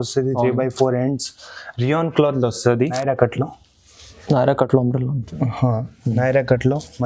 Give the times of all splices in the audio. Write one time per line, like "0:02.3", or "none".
0:03.0